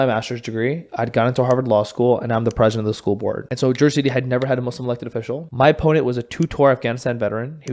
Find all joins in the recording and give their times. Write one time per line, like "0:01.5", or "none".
0:03.5
0:05.5